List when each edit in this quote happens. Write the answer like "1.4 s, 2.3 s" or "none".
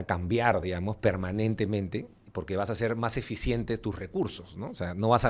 none